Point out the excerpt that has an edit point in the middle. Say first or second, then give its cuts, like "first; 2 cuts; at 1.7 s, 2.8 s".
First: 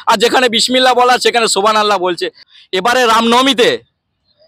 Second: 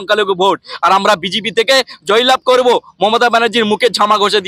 first; 1 cut; at 2.3 s